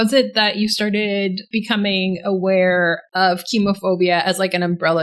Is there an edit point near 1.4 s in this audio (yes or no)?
yes